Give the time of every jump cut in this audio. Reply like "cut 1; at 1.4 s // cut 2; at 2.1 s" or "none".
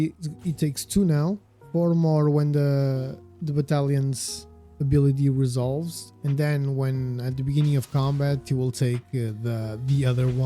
cut 1; at 1.5 s